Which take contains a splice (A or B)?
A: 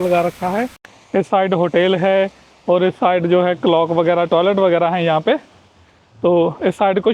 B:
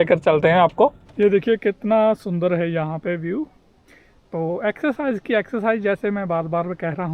B